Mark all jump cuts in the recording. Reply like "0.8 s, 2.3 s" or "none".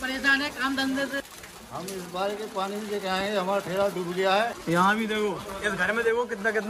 1.2 s, 4.6 s